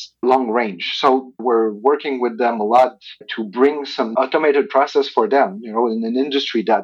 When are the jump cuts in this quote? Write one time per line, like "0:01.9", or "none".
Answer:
0:01.4